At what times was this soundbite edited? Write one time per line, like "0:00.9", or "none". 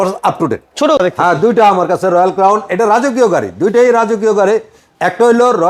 0:01.0